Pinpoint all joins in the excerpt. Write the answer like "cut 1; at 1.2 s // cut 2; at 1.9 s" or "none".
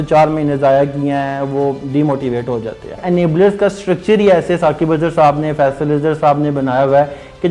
cut 1; at 3.0 s